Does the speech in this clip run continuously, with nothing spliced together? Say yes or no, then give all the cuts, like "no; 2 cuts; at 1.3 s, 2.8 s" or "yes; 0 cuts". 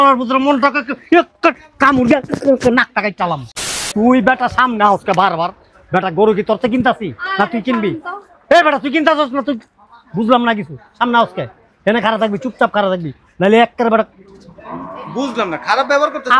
no; 1 cut; at 3.6 s